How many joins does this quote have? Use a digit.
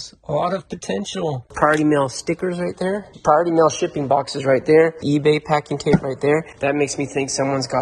3